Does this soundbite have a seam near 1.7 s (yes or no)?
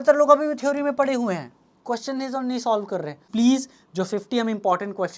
no